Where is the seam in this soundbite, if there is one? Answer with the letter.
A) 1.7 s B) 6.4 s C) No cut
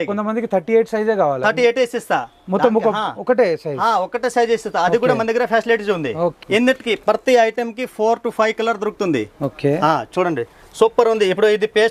B